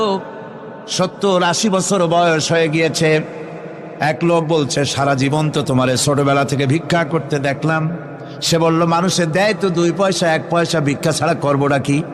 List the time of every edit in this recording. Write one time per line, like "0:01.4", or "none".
none